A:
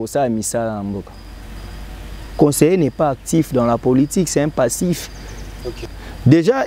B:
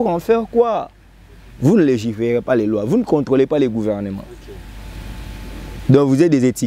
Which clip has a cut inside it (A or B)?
A